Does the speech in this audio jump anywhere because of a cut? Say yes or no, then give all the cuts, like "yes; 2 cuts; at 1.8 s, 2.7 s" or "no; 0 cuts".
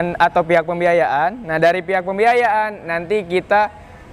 no; 0 cuts